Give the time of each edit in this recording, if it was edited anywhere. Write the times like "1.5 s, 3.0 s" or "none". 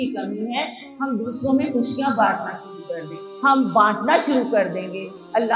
3.2 s